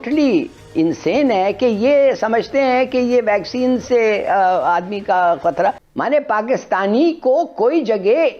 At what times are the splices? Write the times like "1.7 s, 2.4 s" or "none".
5.8 s

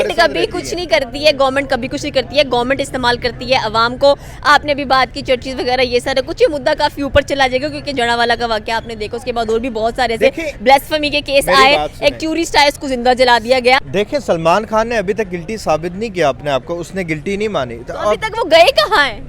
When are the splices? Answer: 13.8 s

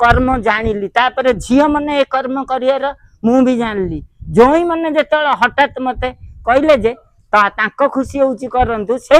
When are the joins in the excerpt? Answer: none

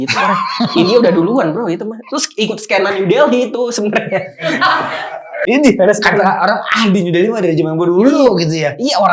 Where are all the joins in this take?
5.4 s

